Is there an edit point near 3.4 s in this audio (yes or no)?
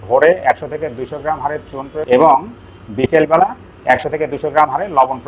no